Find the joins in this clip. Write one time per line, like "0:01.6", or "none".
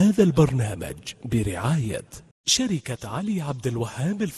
none